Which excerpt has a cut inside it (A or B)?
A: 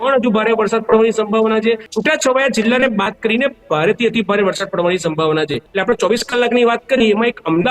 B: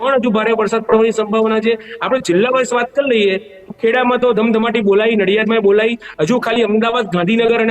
A